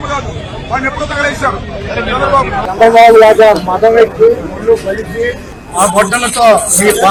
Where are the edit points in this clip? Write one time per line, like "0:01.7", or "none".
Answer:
none